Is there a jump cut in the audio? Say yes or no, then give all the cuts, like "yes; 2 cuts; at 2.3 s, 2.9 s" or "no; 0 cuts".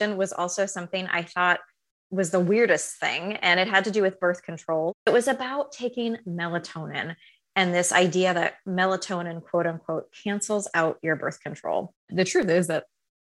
yes; 2 cuts; at 5.1 s, 12.1 s